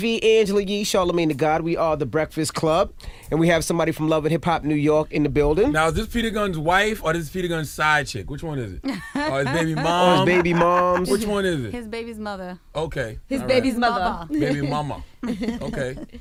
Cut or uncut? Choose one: uncut